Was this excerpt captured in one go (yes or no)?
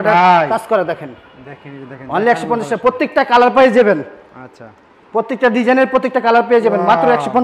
yes